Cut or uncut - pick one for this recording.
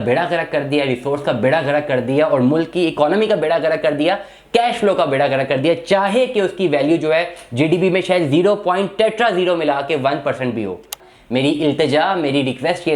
cut